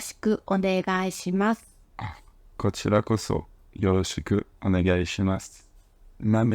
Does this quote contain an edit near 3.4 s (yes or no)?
no